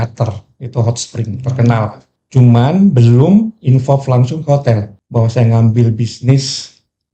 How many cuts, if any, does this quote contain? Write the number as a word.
two